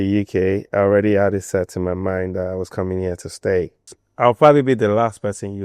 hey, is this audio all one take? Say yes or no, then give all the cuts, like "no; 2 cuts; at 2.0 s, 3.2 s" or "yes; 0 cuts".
no; 1 cut; at 3.9 s